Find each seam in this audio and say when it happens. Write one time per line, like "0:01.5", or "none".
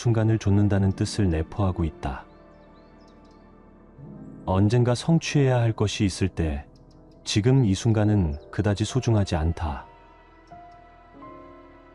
none